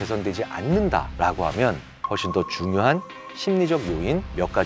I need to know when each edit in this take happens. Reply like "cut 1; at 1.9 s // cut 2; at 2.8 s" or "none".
none